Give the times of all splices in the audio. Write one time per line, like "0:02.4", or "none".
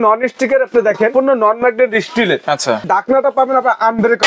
0:01.1
0:02.8